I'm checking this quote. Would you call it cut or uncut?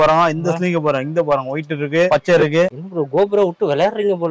uncut